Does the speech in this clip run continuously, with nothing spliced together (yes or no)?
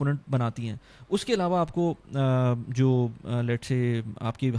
yes